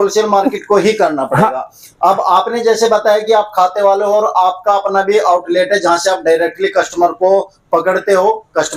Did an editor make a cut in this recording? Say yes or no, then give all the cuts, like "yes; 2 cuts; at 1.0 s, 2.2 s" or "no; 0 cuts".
no; 0 cuts